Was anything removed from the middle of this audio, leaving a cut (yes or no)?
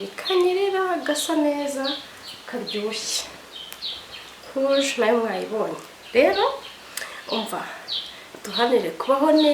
no